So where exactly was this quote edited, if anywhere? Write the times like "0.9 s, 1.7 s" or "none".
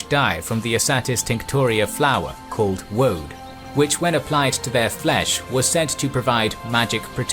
3.6 s